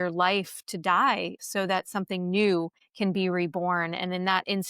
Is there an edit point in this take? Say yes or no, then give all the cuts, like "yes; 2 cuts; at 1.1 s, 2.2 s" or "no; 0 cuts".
yes; 2 cuts; at 1.4 s, 2.8 s